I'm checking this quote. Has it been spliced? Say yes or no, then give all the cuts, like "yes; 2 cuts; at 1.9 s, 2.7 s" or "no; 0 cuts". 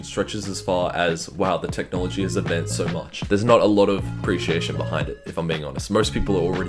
no; 0 cuts